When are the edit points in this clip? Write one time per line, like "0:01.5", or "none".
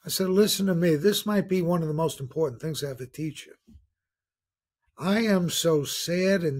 0:01.0

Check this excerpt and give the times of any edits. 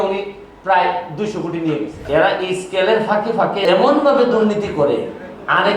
0:02.0
0:03.6

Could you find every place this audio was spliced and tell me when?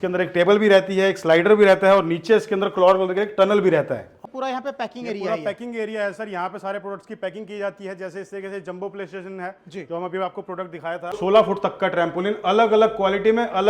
0:04.2
0:11.2

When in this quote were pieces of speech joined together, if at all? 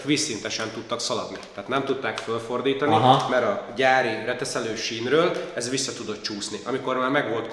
none

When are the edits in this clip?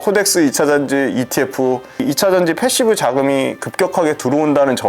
0:02.0

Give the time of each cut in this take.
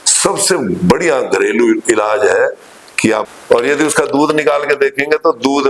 0:03.2

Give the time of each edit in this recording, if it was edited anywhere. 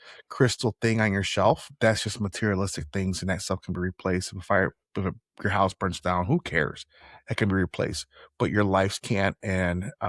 0:01.7

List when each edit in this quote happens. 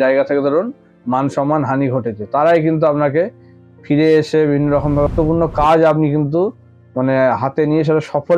0:05.1

